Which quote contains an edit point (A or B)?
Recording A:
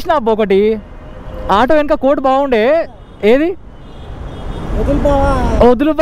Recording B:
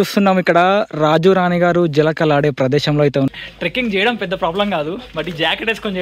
B